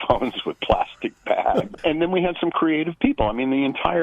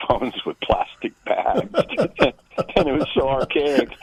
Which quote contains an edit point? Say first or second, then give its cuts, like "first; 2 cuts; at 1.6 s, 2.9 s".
first; 1 cut; at 1.7 s